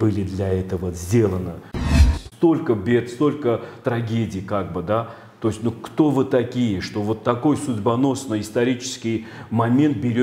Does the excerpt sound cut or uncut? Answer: cut